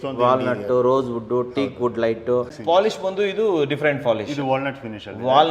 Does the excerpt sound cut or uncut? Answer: cut